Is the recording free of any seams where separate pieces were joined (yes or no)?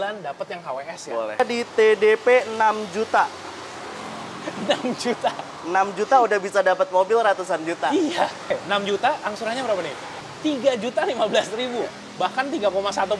no